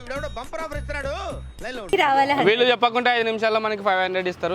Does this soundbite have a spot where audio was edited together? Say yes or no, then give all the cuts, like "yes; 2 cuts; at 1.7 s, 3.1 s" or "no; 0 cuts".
yes; 1 cut; at 1.9 s